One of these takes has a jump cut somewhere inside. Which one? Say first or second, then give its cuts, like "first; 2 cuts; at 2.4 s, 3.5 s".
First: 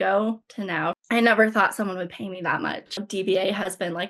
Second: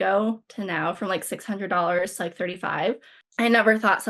first; 2 cuts; at 1.0 s, 3.0 s